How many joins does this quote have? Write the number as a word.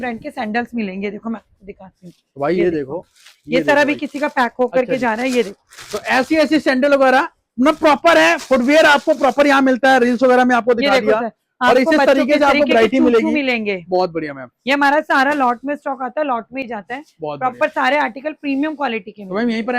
zero